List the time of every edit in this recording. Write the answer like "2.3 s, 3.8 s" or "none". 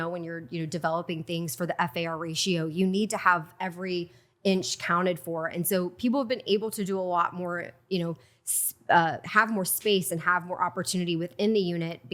none